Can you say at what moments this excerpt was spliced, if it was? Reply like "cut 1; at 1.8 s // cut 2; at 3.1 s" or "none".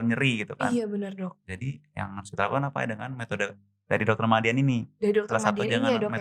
none